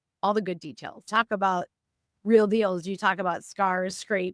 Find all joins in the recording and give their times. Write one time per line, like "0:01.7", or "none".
0:01.1